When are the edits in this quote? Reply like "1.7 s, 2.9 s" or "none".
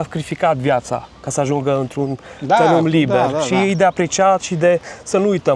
none

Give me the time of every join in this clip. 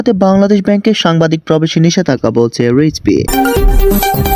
3.3 s

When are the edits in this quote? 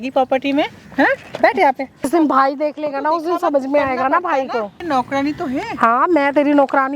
2.1 s, 4.8 s

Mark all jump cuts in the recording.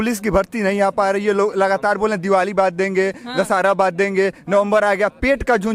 none

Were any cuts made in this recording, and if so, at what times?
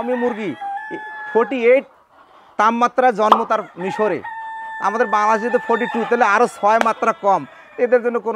none

